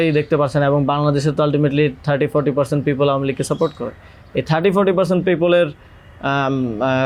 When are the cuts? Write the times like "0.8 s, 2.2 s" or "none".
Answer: none